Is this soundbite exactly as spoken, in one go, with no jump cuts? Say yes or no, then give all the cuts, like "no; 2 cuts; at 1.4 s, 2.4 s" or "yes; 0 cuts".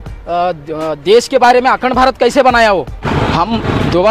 no; 1 cut; at 3.1 s